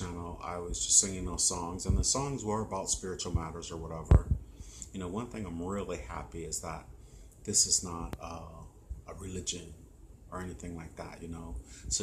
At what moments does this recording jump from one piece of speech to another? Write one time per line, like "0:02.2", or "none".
none